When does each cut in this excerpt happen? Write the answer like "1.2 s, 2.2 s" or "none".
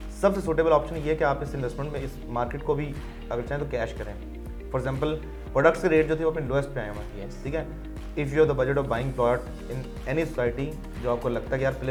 none